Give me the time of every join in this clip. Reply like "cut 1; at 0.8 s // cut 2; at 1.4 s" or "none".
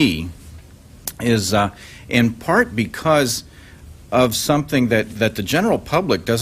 none